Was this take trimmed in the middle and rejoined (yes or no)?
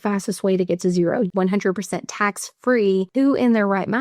yes